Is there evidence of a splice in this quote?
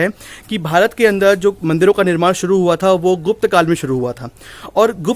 no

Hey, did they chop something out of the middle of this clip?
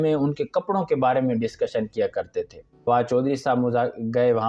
yes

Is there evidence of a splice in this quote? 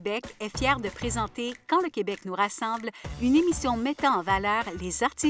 no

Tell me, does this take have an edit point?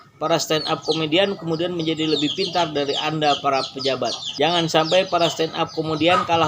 no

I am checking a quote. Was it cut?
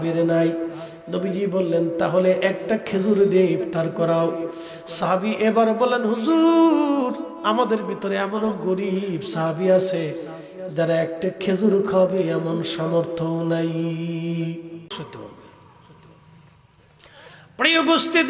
yes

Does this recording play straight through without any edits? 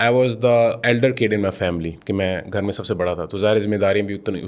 yes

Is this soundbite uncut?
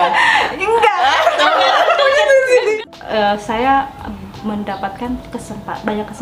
no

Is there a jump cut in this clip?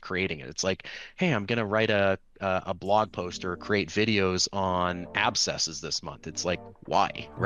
no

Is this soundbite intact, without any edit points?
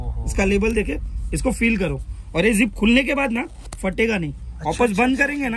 yes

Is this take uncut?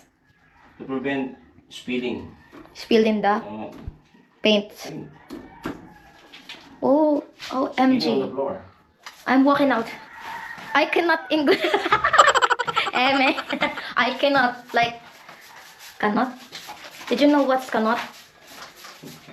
yes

